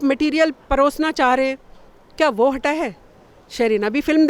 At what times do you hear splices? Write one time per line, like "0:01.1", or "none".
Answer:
none